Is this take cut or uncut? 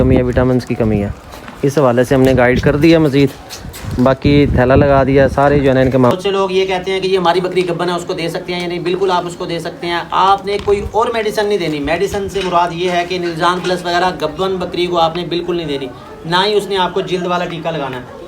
cut